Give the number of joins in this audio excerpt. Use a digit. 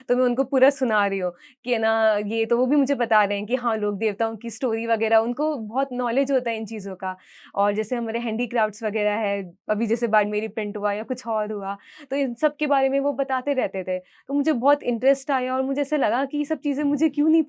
0